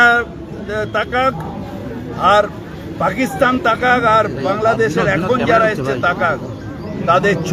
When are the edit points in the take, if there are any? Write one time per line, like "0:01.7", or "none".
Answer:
none